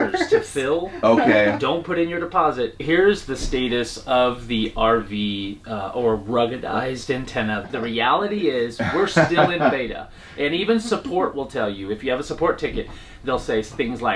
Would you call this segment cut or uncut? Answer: cut